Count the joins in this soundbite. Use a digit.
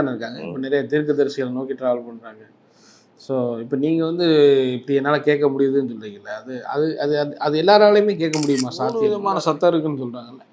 1